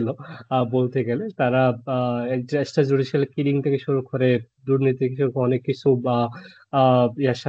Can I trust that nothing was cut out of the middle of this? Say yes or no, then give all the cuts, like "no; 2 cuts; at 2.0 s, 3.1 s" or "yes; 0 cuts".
yes; 0 cuts